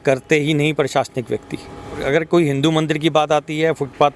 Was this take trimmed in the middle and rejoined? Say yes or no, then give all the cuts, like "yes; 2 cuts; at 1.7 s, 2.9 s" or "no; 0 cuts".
yes; 1 cut; at 2.0 s